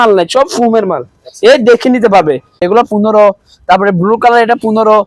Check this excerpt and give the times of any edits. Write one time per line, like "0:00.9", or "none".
0:02.6